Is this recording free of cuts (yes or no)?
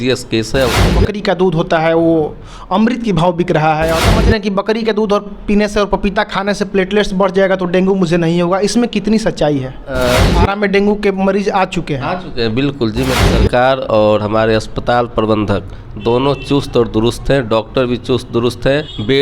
no